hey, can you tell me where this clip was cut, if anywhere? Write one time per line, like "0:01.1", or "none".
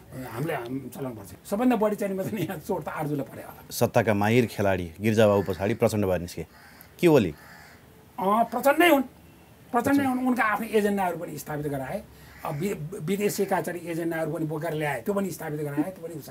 0:01.3
0:03.6